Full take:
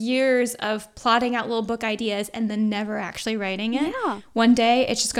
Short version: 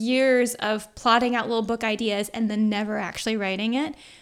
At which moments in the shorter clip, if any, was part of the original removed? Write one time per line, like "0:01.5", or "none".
none